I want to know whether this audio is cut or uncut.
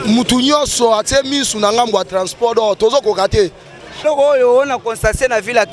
cut